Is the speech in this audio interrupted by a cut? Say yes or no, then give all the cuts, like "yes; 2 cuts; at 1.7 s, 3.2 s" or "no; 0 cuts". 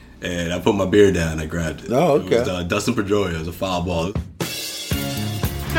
yes; 1 cut; at 4.1 s